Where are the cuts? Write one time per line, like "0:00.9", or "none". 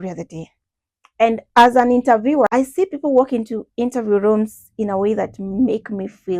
0:01.4
0:02.5